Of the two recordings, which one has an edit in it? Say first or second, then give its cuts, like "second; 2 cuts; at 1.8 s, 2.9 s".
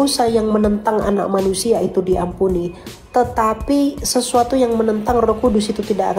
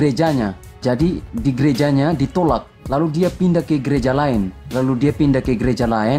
second; 3 cuts; at 0.8 s, 2.7 s, 4.6 s